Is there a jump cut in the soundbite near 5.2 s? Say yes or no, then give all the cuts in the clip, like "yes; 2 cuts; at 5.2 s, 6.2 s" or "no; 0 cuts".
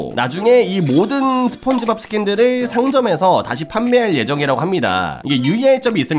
yes; 1 cut; at 5.2 s